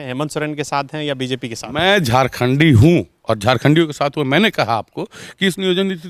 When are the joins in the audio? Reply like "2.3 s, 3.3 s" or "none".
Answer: none